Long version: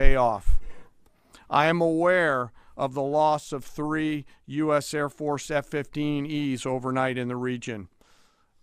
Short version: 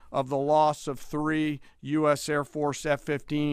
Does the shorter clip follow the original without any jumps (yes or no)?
yes